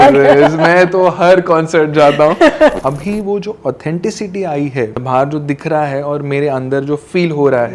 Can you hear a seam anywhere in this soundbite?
yes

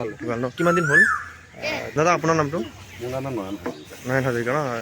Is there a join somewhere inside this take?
yes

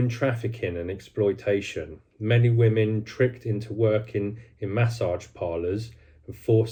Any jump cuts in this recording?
no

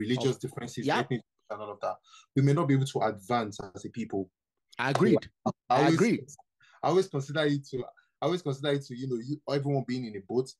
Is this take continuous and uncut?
yes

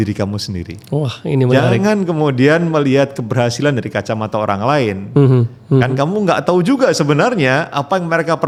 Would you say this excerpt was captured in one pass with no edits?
yes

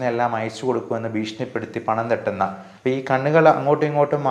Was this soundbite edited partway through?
yes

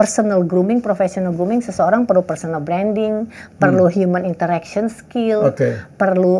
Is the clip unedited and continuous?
yes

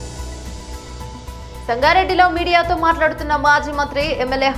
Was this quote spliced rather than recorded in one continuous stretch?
yes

